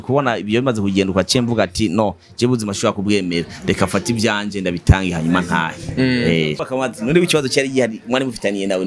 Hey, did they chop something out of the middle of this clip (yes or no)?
yes